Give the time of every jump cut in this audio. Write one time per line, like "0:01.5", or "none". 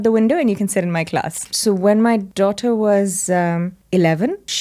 0:01.4
0:02.3